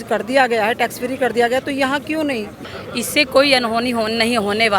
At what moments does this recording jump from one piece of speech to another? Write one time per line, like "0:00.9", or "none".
0:02.5